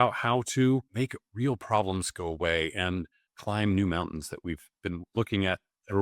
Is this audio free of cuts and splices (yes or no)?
yes